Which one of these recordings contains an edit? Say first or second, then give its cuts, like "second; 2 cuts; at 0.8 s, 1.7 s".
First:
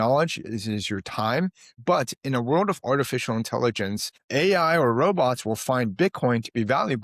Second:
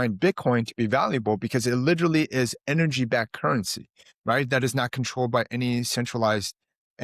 first; 2 cuts; at 1.8 s, 4.2 s